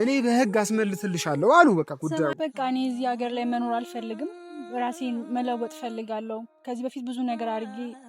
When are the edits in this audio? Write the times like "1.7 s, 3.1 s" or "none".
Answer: 2.3 s